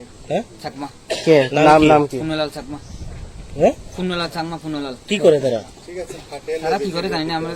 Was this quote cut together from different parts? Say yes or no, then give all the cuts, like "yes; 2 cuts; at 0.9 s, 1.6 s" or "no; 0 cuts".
no; 0 cuts